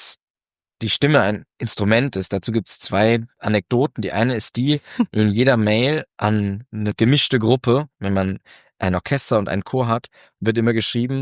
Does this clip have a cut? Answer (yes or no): no